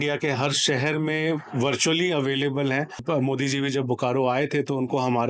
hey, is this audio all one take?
no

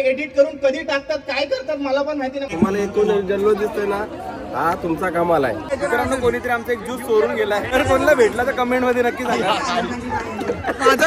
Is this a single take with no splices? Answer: no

